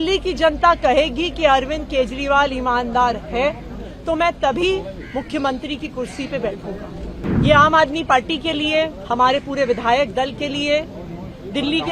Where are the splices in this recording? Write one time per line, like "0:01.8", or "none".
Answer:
0:07.2